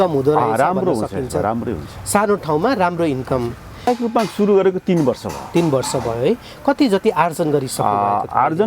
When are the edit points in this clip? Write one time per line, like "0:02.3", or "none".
0:03.9

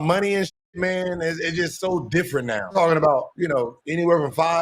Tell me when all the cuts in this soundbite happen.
0:02.7

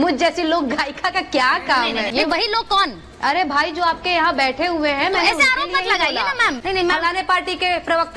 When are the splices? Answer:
0:02.1
0:06.6

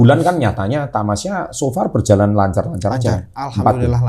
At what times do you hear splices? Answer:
none

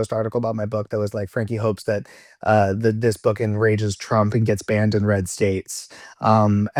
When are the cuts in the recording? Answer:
none

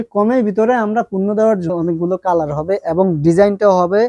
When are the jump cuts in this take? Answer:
0:01.7

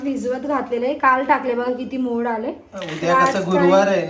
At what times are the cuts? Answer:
none

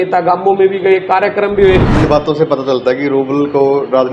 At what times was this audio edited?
0:01.9

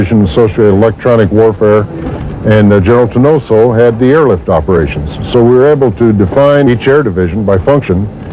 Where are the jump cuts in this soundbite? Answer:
none

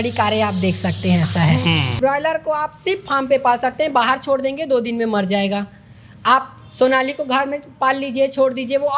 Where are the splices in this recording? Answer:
0:01.9

